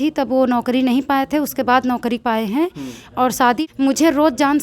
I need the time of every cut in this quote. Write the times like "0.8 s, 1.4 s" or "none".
3.6 s